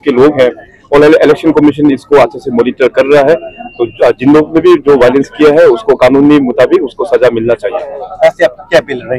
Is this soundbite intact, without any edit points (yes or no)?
yes